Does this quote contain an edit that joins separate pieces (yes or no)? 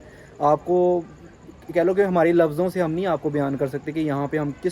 no